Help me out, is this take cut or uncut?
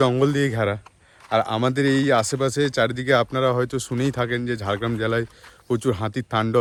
uncut